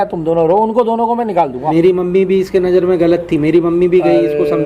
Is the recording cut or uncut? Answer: cut